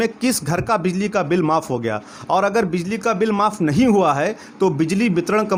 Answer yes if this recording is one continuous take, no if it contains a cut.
yes